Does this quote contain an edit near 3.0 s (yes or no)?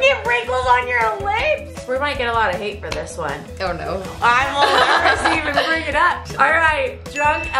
no